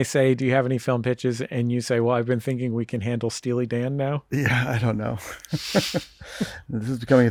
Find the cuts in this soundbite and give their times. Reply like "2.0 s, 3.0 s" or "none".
none